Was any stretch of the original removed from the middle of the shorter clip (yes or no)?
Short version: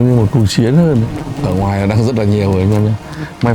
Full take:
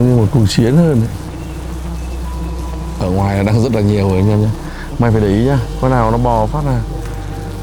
yes